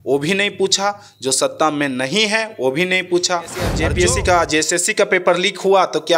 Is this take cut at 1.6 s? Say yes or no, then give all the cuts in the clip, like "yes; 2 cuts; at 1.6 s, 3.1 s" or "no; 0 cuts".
no; 1 cut; at 3.8 s